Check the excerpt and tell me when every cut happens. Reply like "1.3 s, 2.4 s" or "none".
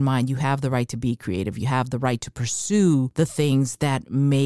3.1 s